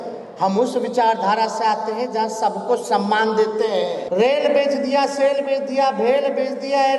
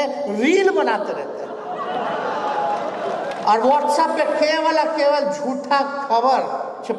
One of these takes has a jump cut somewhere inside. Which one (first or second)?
first